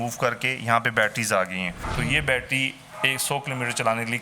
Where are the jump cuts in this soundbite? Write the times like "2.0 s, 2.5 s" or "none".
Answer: 1.8 s